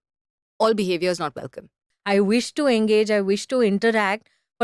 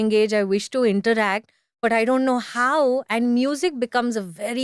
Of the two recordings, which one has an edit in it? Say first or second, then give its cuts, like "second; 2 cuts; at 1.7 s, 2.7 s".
first; 1 cut; at 1.8 s